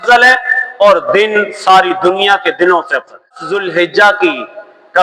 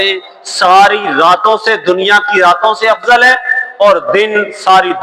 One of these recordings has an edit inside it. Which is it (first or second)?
first